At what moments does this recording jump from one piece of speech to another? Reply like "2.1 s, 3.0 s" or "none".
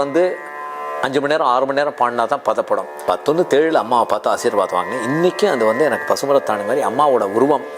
3.0 s